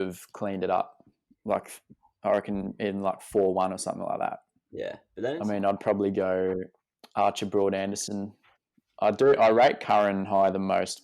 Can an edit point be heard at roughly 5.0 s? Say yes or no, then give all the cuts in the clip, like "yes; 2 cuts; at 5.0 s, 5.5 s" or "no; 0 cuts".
yes; 1 cut; at 5.0 s